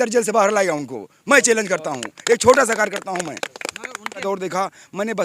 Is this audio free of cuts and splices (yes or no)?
no